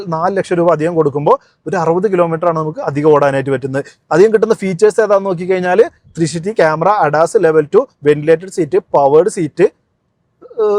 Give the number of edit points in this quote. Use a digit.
0